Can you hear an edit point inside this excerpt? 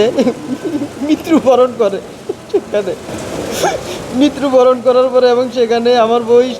yes; 1 cut; at 3.1 s

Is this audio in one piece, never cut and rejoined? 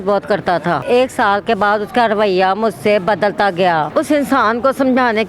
no; 2 cuts; at 0.8 s, 3.9 s

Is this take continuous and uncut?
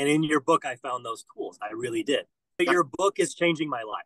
no; 1 cut; at 2.6 s

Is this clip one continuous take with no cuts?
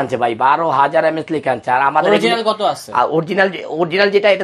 yes; 0 cuts

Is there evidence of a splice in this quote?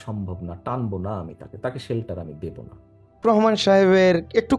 yes; 1 cut; at 3.2 s

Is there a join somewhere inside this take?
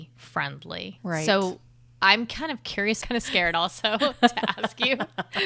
yes; 1 cut; at 3.0 s

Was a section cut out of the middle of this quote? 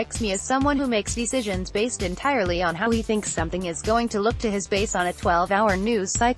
no; 0 cuts

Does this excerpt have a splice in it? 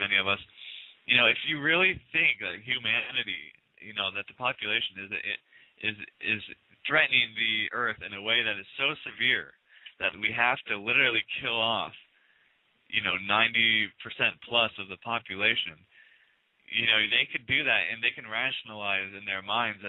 no; 0 cuts

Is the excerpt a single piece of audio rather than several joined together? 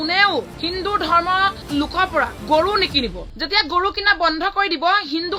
yes; 0 cuts

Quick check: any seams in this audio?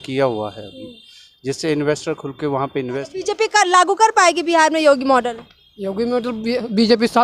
yes; 1 cut; at 3.0 s

